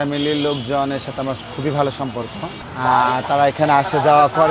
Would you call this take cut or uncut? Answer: uncut